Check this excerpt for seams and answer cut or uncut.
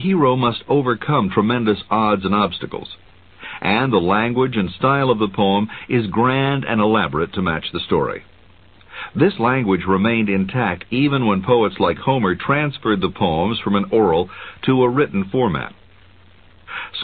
uncut